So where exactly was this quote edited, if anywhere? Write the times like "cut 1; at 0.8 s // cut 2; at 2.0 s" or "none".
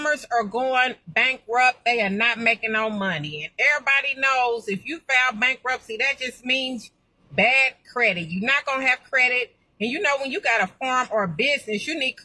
none